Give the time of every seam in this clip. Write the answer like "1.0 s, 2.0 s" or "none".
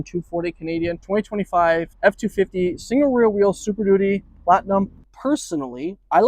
1.0 s, 1.9 s, 5.1 s

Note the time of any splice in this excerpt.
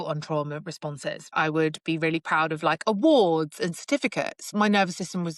1.3 s, 4.4 s

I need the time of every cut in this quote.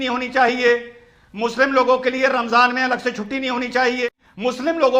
4.0 s

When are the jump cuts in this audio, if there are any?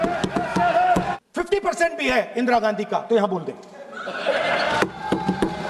1.1 s

